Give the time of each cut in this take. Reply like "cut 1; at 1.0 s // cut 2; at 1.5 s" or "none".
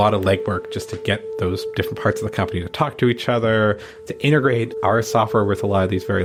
none